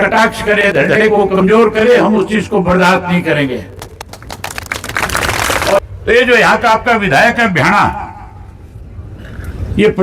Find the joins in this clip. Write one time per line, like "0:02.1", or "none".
0:05.8